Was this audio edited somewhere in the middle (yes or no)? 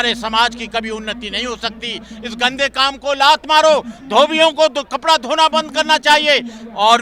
no